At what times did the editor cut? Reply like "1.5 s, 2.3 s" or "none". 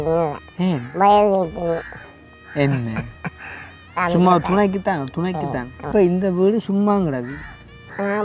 5.8 s